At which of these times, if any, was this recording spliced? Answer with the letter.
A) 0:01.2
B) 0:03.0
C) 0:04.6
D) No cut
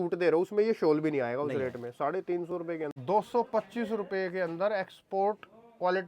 B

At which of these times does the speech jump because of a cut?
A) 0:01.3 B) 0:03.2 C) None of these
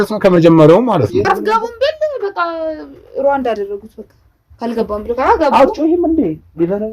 A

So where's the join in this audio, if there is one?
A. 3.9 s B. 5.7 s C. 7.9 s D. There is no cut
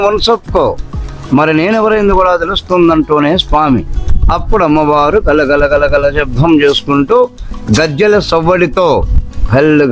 D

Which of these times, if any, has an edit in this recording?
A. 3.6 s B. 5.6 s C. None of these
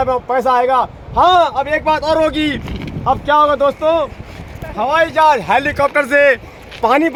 C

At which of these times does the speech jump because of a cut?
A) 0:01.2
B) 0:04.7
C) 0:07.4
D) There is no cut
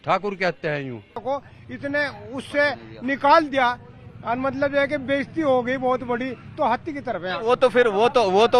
A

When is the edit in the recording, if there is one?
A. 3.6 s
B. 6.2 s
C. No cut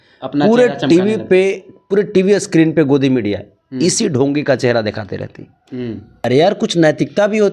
B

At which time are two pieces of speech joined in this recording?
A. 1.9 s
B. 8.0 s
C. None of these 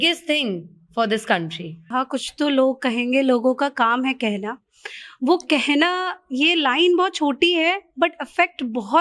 A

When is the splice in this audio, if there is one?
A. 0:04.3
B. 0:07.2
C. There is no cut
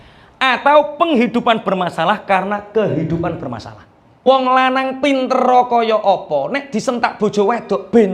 A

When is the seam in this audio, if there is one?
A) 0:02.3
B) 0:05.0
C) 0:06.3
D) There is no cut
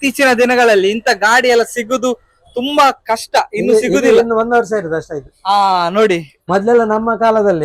C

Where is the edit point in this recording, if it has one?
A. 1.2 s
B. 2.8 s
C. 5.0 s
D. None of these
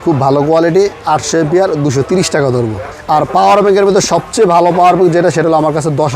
B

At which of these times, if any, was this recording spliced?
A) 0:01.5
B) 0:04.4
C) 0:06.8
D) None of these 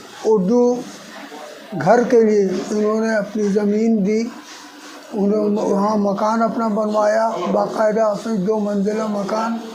D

